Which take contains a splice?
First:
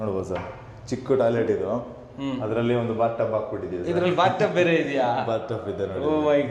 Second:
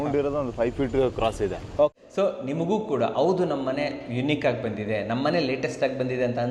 second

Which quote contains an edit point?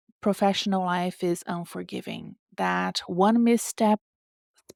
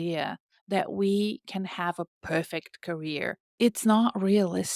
second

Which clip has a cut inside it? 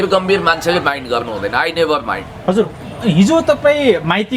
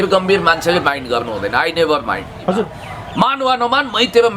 second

